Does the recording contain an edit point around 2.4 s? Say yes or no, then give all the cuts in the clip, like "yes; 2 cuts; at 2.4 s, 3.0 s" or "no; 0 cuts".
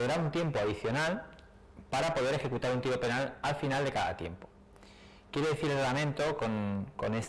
yes; 1 cut; at 2.4 s